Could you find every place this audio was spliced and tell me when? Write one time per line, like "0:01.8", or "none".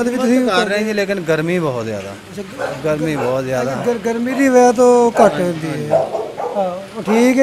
none